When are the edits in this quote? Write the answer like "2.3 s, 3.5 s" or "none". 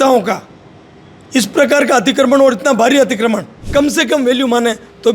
3.6 s